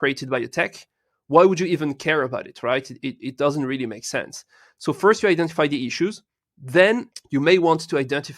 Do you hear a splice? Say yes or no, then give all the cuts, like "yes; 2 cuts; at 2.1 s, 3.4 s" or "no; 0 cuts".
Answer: yes; 1 cut; at 7.1 s